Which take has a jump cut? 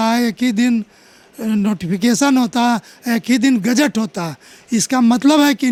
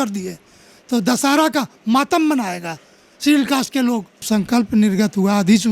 second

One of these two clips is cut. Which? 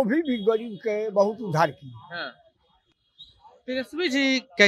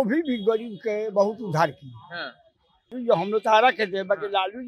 second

